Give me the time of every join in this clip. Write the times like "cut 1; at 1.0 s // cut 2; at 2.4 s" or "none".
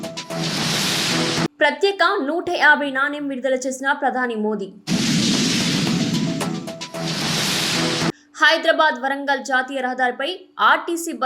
cut 1; at 1.5 s

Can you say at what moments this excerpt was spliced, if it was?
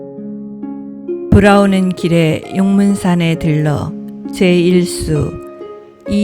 cut 1; at 1.3 s

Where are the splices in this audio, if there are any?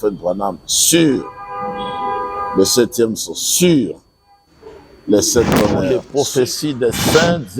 cut 1; at 6.0 s

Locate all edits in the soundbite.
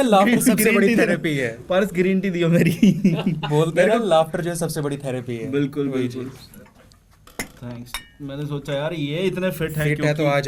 none

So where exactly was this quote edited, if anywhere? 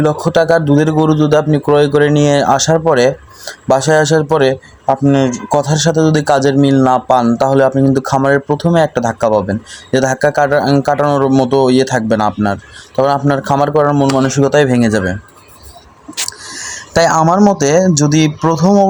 none

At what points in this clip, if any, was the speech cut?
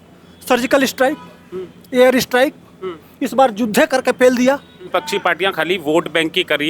cut 1; at 4.9 s

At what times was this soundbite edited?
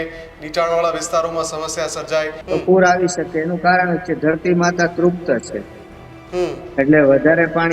cut 1; at 2.4 s

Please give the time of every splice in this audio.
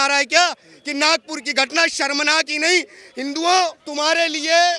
cut 1; at 3.8 s

